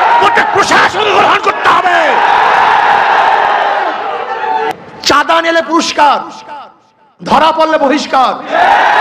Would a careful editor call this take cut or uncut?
cut